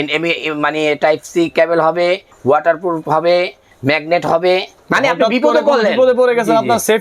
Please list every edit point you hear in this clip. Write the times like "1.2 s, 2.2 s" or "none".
2.3 s, 4.8 s